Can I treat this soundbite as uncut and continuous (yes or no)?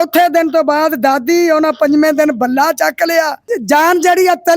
no